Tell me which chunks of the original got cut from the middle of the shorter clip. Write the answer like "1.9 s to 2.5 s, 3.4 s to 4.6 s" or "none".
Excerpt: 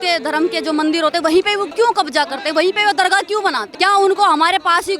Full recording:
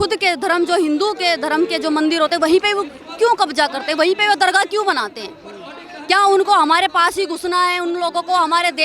2.8 s to 3.1 s, 5.1 s to 5.9 s